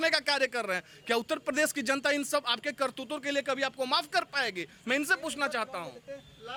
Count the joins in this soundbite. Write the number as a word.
zero